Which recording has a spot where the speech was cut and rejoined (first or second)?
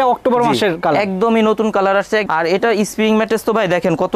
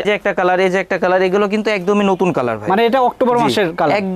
first